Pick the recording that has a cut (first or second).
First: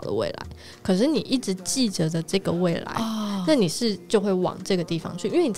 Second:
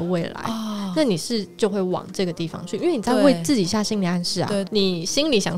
second